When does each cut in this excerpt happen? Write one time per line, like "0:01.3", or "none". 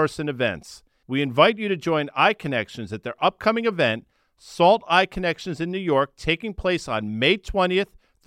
none